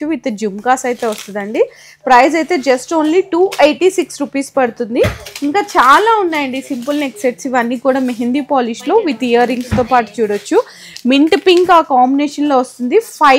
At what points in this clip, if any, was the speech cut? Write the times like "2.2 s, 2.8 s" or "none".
none